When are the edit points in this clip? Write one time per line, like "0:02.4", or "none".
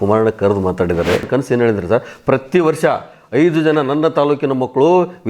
0:01.3